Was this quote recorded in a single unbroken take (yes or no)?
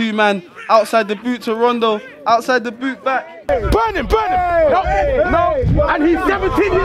no